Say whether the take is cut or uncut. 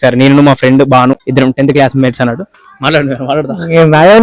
cut